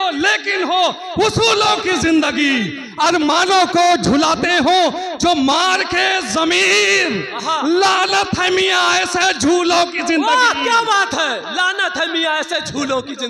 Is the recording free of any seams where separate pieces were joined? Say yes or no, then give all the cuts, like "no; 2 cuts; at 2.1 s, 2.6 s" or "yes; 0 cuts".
yes; 0 cuts